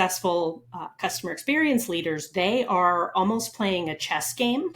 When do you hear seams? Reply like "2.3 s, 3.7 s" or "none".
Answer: none